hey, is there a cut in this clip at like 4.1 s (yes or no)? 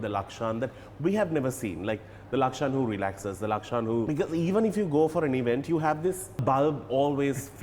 yes